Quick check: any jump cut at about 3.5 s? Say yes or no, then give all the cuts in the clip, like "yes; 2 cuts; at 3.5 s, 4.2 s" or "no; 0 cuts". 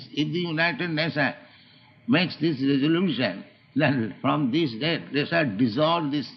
yes; 1 cut; at 3.5 s